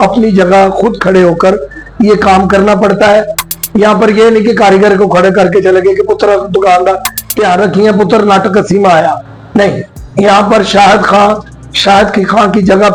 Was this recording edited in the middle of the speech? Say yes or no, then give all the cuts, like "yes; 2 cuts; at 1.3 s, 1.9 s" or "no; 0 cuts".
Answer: no; 0 cuts